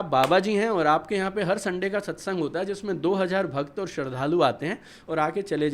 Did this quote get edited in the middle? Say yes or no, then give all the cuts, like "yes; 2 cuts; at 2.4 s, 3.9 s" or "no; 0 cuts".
no; 0 cuts